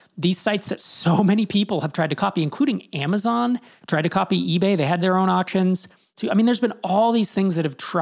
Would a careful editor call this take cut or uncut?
cut